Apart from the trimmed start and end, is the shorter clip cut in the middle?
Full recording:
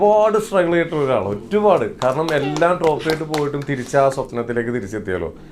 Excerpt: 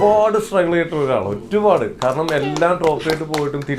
no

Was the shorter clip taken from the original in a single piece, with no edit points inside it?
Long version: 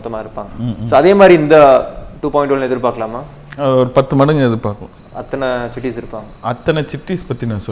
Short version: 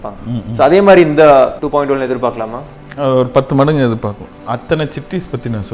no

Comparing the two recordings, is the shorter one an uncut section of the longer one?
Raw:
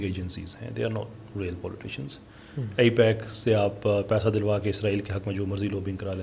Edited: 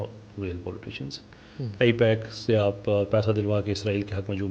yes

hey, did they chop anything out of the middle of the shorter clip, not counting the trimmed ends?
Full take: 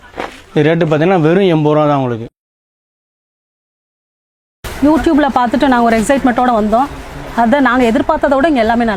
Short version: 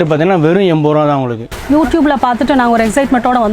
yes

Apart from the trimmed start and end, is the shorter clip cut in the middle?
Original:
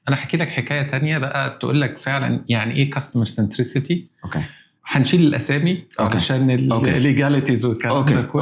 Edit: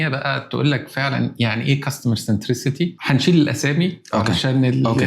yes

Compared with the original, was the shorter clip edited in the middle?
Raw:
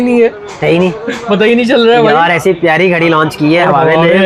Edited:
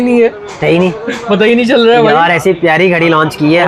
no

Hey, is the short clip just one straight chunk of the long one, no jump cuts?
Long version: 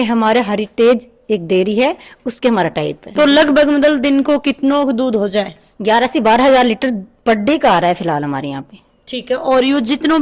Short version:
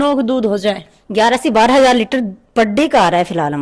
yes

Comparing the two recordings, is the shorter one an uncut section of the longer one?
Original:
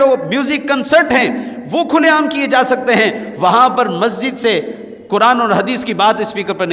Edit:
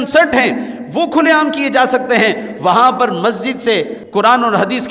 no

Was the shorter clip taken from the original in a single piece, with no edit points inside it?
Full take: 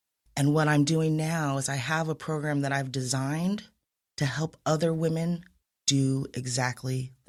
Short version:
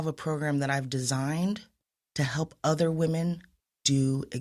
yes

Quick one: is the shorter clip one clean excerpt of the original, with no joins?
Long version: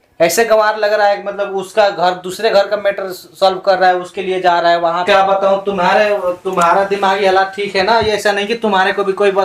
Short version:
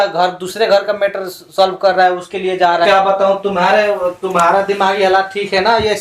no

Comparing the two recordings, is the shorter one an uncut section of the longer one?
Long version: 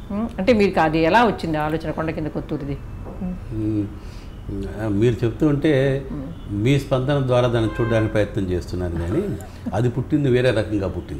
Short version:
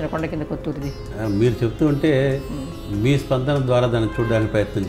no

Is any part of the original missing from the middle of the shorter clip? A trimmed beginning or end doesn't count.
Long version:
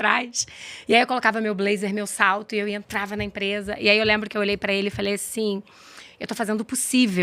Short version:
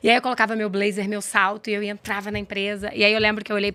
no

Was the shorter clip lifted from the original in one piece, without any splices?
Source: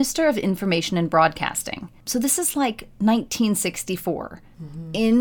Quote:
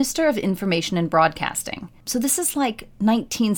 yes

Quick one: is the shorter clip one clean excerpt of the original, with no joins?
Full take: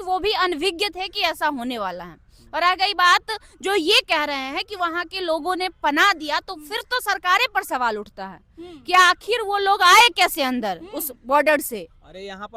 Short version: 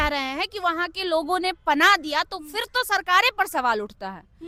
yes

